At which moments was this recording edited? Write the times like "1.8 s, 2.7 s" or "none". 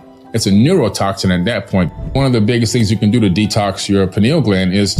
2.1 s